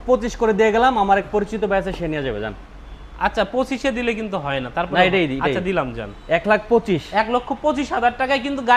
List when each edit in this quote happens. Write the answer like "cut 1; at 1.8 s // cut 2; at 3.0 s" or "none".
none